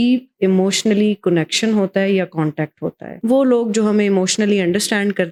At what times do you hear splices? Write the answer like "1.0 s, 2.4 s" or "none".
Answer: none